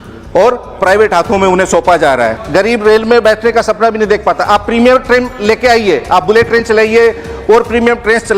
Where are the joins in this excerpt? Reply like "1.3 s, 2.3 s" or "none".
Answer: 2.4 s